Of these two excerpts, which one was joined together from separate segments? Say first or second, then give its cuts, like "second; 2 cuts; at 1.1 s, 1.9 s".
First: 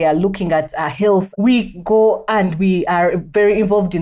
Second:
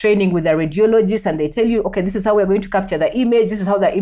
first; 1 cut; at 1.3 s